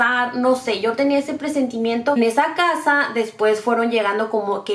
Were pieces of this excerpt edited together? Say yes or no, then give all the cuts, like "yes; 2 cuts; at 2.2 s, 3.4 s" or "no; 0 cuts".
yes; 1 cut; at 2.2 s